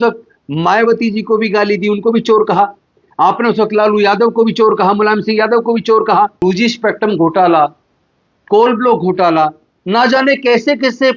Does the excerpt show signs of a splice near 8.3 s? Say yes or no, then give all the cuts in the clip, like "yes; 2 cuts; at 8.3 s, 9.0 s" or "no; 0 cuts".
no; 1 cut; at 6.4 s